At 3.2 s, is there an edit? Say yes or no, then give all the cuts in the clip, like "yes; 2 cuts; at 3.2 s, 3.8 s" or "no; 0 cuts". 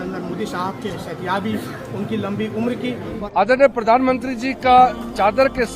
yes; 1 cut; at 3.2 s